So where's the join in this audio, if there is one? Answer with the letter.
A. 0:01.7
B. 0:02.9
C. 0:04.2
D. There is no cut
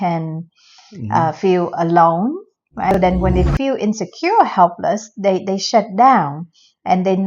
B